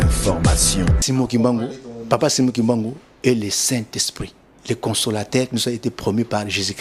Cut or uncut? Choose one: cut